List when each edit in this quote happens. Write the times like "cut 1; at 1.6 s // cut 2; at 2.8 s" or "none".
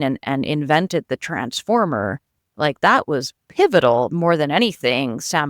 none